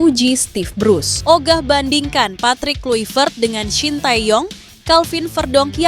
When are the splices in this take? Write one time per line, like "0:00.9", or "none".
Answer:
0:01.1